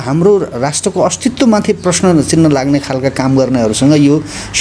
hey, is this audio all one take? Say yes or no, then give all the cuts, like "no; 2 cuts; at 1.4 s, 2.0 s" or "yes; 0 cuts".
yes; 0 cuts